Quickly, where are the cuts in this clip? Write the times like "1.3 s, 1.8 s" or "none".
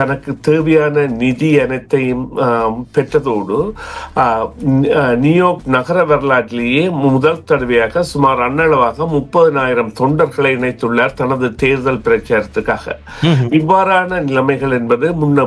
none